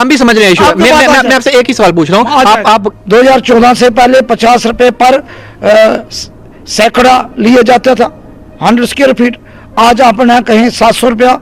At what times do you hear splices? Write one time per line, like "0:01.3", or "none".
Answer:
0:02.9